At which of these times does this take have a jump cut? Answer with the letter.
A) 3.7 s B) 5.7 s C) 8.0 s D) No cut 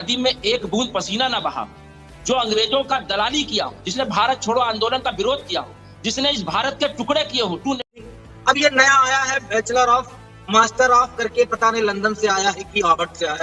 C